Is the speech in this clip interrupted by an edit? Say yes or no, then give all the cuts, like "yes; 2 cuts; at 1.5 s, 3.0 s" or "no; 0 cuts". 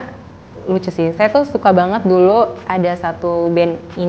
no; 0 cuts